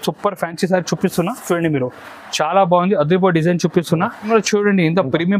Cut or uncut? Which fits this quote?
cut